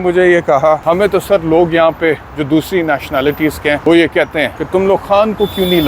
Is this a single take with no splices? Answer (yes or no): no